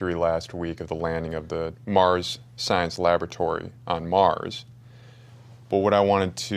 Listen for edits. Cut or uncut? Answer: cut